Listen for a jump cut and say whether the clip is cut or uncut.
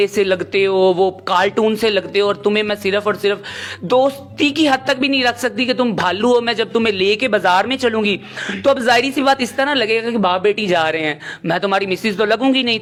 uncut